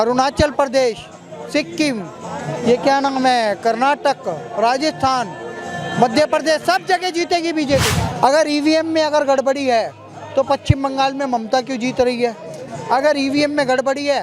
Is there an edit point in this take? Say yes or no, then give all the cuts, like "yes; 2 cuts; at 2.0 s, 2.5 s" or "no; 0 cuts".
yes; 1 cut; at 8.0 s